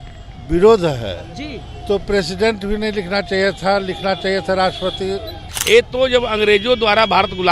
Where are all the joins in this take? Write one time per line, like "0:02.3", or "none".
0:05.5